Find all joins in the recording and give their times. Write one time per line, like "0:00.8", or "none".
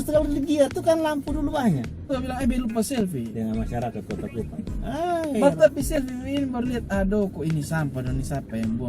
0:02.1